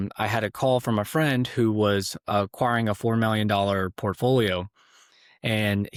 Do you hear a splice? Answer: no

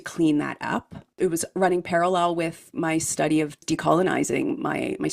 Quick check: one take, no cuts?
no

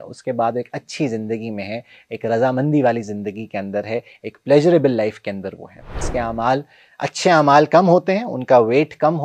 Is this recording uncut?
no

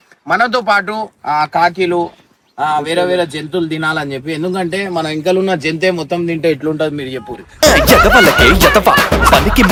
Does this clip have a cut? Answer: no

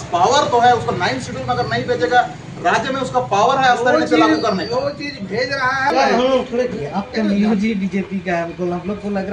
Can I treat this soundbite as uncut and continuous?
no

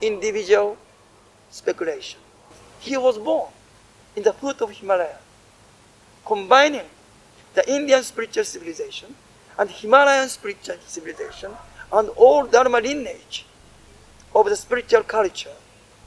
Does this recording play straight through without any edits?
no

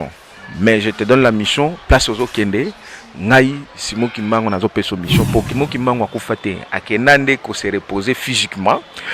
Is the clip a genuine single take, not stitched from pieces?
no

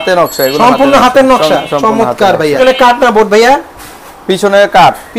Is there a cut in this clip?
yes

